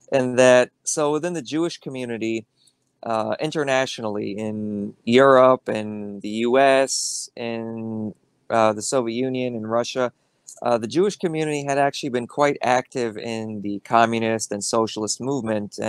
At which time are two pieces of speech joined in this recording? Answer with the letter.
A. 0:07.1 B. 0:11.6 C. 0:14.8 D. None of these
D